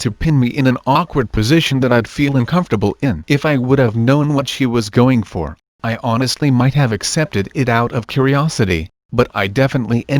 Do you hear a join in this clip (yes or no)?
yes